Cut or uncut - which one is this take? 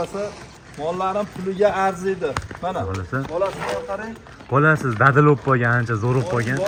uncut